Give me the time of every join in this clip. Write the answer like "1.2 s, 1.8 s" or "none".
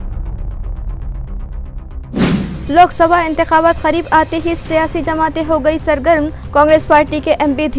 2.6 s